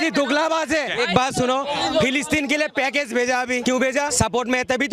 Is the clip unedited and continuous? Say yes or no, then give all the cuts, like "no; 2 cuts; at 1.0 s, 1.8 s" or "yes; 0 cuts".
no; 2 cuts; at 0.9 s, 3.8 s